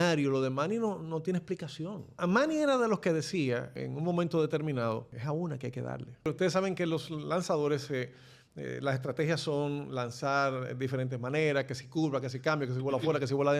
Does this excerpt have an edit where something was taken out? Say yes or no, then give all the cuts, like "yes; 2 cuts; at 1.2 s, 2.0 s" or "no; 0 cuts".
yes; 4 cuts; at 2.2 s, 3.8 s, 5.1 s, 6.3 s